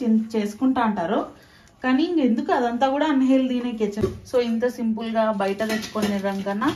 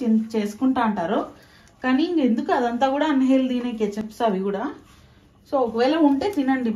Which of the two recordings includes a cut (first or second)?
first